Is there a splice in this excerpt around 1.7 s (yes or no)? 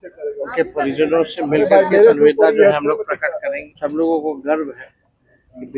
no